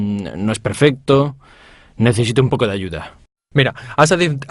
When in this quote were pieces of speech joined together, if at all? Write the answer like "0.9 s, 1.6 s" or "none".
1.8 s